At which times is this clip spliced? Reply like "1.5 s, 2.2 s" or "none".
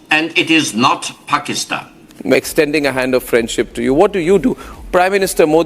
none